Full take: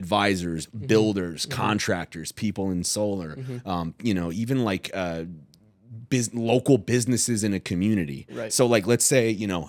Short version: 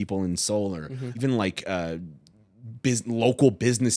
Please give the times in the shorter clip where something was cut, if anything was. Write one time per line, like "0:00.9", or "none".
0:01.2